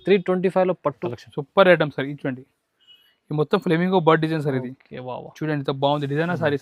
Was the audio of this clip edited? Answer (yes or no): yes